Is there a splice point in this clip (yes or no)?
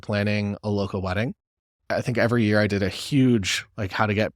no